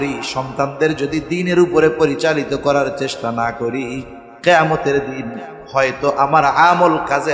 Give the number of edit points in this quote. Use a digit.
0